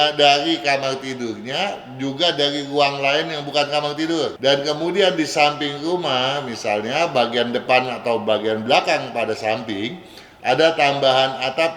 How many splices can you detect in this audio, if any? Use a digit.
1